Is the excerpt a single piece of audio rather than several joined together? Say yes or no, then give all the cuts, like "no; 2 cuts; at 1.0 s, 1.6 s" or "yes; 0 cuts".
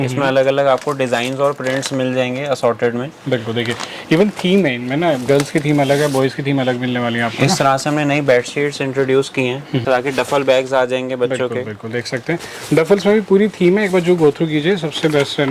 no; 1 cut; at 9.8 s